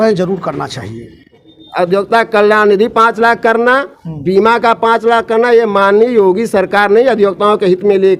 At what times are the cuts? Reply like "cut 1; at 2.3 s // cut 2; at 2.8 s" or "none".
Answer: cut 1; at 1.6 s